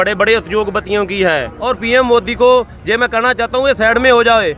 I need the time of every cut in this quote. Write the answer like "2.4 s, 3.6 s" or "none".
1.6 s